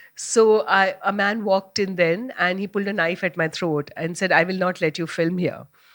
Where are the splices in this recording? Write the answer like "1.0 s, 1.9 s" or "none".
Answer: none